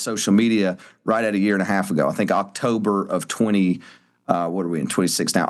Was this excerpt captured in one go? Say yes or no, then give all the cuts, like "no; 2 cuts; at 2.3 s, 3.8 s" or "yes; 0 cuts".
yes; 0 cuts